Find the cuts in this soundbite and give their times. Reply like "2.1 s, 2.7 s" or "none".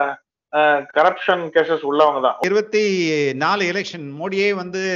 2.4 s